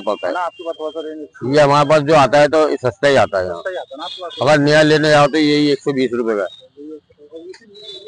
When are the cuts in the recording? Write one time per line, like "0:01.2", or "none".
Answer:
none